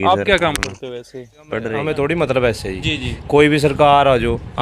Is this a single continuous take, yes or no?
no